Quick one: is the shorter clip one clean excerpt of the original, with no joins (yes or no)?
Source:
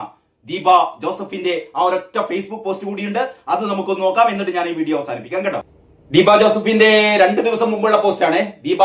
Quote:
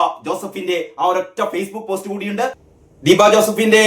no